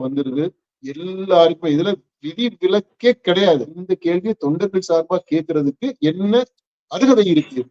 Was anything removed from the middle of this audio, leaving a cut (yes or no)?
yes